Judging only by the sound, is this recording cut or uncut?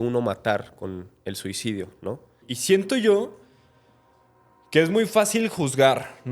cut